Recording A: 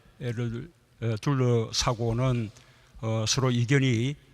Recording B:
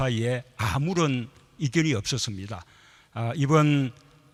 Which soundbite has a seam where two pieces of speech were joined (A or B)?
A